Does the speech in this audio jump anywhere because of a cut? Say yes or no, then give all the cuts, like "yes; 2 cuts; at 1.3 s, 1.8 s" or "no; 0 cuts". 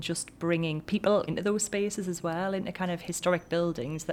no; 0 cuts